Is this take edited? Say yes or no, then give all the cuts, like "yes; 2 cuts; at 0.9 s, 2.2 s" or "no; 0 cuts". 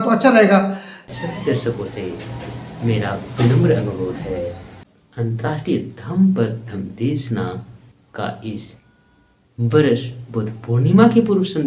yes; 1 cut; at 1.0 s